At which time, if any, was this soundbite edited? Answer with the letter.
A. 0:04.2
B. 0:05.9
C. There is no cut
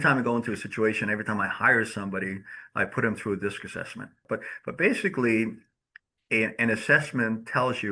A